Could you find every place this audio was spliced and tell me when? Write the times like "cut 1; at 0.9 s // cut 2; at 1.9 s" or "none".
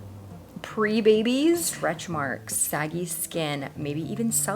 cut 1; at 2.2 s